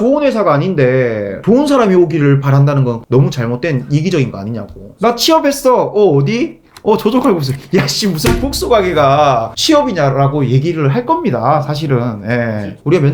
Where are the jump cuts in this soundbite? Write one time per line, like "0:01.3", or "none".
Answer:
none